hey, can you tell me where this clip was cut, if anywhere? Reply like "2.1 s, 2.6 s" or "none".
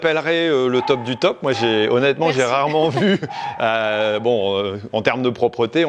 none